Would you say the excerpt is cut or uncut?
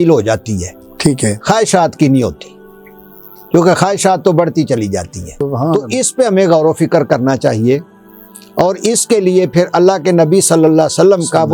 cut